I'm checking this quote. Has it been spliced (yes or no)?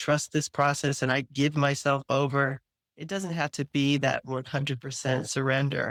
no